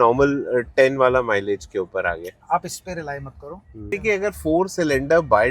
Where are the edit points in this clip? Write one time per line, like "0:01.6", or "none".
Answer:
0:03.9